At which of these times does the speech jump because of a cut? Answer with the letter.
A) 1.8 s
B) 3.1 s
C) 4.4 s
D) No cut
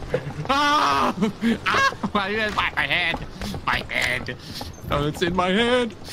D